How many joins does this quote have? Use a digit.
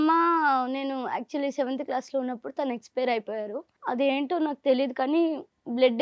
1